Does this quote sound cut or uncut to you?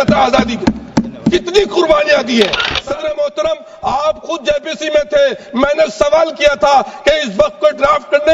cut